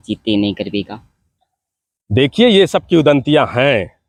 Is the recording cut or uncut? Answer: uncut